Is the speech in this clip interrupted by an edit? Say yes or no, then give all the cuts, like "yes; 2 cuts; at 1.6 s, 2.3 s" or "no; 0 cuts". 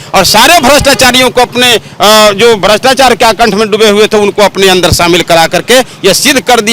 no; 0 cuts